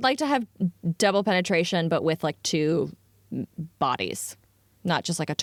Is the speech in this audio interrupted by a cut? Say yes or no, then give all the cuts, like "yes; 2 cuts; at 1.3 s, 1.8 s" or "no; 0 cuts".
no; 0 cuts